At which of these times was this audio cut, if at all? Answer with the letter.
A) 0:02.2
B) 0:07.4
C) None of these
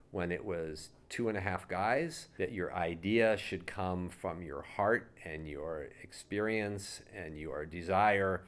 A